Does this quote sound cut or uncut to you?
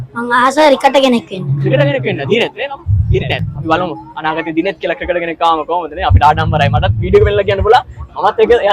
uncut